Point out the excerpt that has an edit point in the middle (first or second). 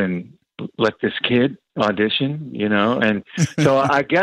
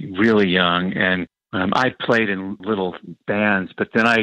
second